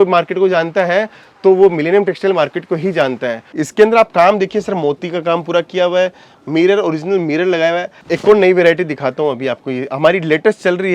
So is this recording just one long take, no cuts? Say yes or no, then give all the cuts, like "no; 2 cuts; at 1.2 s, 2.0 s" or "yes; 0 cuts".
no; 2 cuts; at 3.5 s, 7.9 s